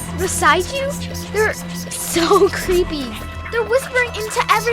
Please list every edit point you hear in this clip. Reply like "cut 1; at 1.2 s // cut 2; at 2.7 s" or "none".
cut 1; at 3.1 s